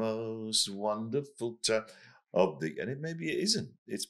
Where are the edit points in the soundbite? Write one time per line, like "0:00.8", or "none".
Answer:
none